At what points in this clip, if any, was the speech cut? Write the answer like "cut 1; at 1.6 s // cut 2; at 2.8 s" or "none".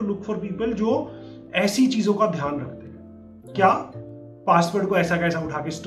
none